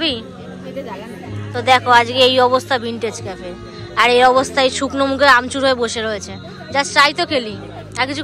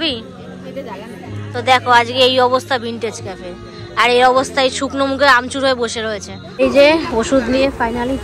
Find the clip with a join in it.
second; 1 cut; at 6.4 s

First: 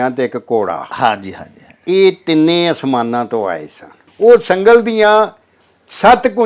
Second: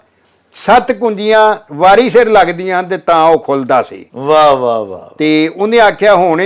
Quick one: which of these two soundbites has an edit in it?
first; 1 cut; at 4.0 s

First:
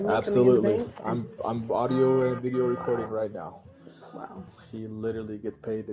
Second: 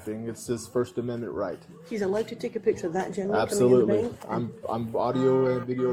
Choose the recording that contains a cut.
first; 1 cut; at 4.6 s

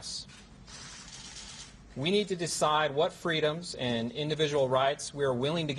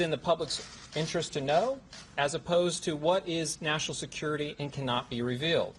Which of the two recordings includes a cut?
first; 1 cut; at 4.8 s

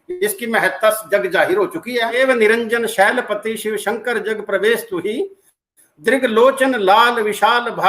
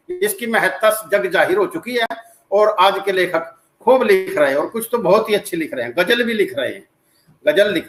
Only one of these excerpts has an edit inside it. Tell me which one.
first; 1 cut; at 2.2 s

